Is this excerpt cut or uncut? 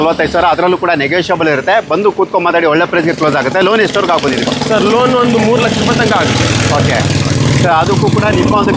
uncut